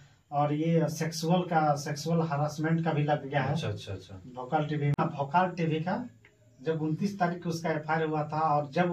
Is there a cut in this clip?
yes; 1 cut; at 5.0 s

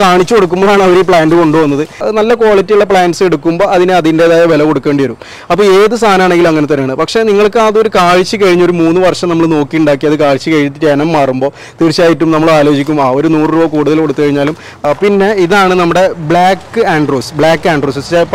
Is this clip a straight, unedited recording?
no; 2 cuts; at 2.0 s, 14.7 s

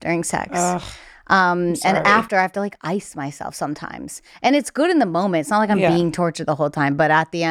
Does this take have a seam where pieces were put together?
no; 0 cuts

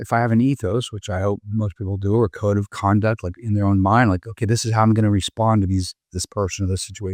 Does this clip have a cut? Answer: no; 0 cuts

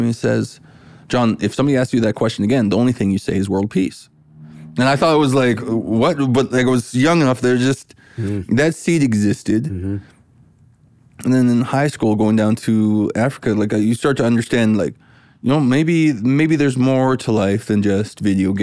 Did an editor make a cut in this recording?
no; 0 cuts

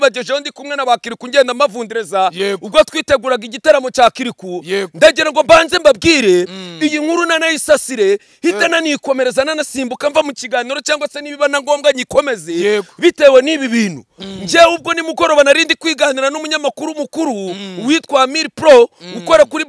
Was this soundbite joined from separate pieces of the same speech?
no; 0 cuts

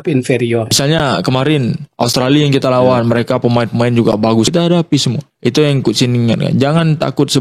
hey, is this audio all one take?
no; 2 cuts; at 0.8 s, 4.5 s

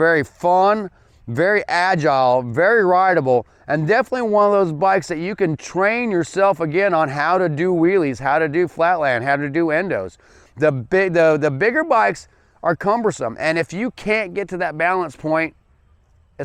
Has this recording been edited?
no; 0 cuts

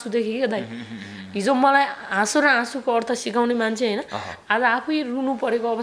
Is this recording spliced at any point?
no; 0 cuts

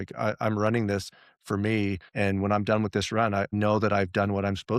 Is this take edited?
yes; 2 cuts; at 2.0 s, 3.5 s

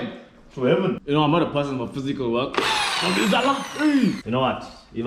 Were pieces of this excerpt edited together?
yes; 2 cuts; at 1.0 s, 4.2 s

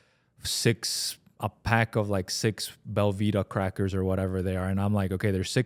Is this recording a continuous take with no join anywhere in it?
yes; 0 cuts

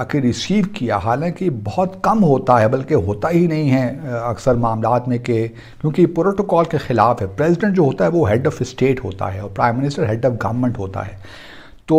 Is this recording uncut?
yes; 0 cuts

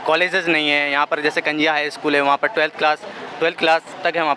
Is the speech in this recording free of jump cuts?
yes; 0 cuts

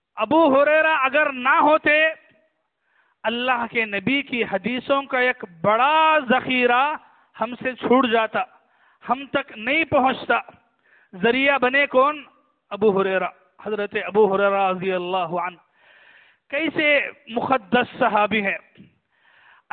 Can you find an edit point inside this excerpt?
no; 0 cuts

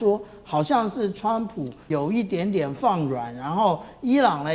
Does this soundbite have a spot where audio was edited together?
yes; 1 cut; at 1.8 s

